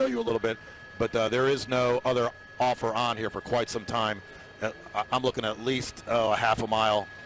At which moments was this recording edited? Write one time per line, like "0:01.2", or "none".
0:01.3